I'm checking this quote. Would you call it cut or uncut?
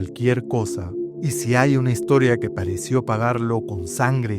cut